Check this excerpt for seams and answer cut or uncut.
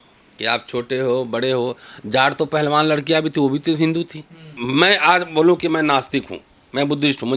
cut